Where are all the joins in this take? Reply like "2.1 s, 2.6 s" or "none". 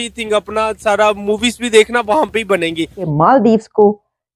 3.1 s